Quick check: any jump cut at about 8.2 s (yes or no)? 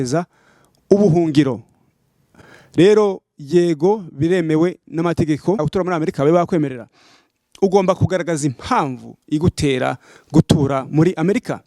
no